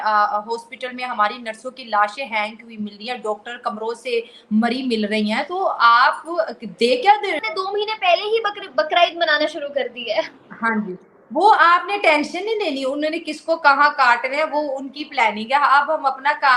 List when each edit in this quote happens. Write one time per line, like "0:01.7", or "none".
0:07.4